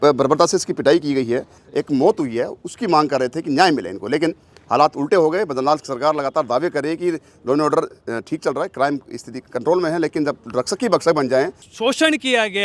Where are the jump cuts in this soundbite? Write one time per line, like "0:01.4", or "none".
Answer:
0:01.6
0:11.6

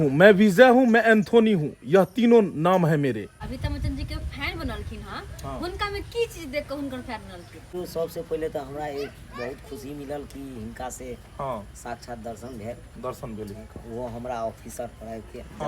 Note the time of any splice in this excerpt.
0:03.3
0:07.7

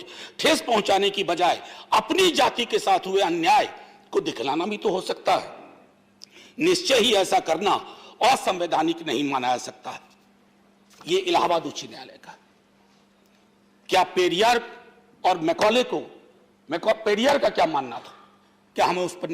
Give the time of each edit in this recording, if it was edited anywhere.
none

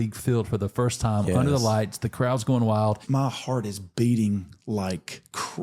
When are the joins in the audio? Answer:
0:03.0

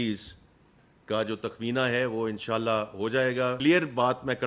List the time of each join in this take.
0:03.6

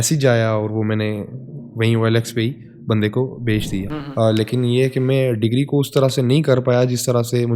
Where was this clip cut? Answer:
0:03.9

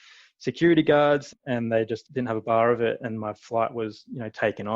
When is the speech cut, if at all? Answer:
0:01.6

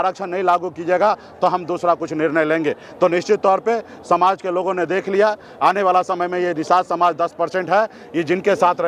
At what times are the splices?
none

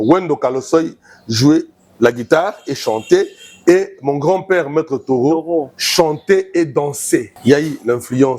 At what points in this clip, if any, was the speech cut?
0:07.3

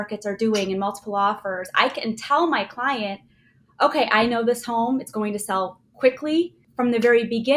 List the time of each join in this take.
0:06.6

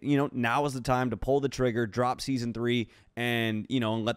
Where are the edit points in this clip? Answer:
none

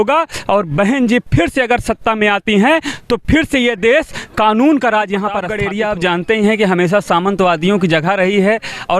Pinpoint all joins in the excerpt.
0:05.6

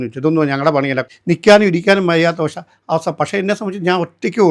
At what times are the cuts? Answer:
0:01.1

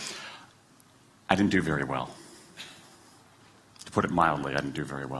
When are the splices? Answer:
0:02.0

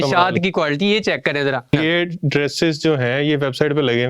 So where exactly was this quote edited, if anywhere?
0:01.7

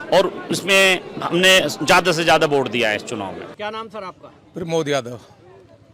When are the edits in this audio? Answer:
none

